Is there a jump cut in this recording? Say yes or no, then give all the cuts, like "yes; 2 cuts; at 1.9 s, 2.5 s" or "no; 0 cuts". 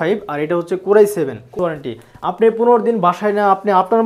yes; 1 cut; at 1.5 s